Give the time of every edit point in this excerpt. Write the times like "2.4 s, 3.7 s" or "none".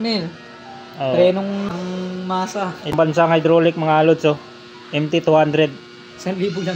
1.7 s, 3.0 s